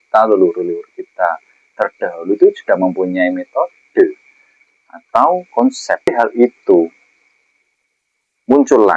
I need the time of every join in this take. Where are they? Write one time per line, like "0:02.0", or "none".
0:06.1